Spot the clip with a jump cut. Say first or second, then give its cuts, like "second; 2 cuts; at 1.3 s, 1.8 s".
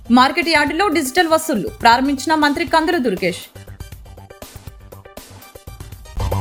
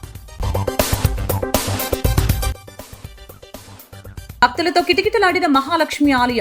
second; 1 cut; at 4.3 s